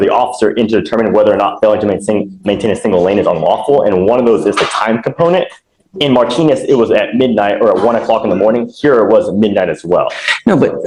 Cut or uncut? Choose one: uncut